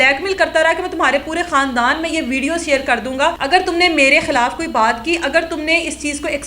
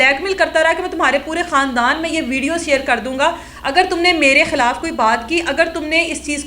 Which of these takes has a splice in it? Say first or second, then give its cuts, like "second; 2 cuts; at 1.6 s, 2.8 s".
first; 1 cut; at 3.4 s